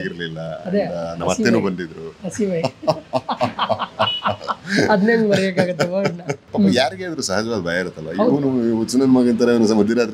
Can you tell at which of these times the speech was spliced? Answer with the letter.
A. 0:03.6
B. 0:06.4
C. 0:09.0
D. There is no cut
B